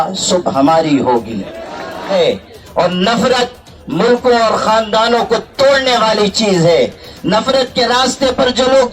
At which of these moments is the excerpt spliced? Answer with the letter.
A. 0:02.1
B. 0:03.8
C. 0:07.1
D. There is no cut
A